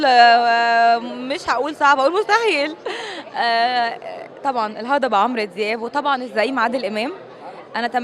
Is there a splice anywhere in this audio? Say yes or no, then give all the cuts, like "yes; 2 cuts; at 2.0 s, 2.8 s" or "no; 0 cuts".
no; 0 cuts